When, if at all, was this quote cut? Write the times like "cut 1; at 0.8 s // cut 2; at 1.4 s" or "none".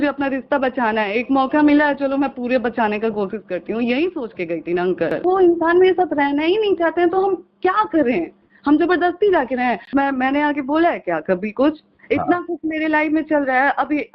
cut 1; at 5.2 s // cut 2; at 9.9 s